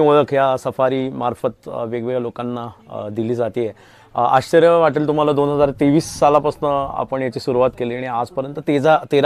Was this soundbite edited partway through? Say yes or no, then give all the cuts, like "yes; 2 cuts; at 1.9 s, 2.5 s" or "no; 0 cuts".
no; 0 cuts